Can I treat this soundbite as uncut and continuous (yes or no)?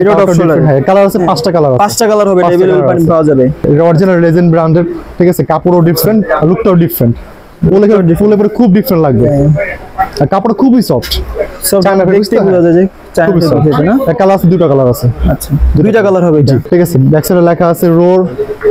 no